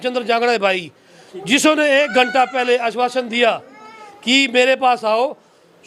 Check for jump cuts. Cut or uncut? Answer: uncut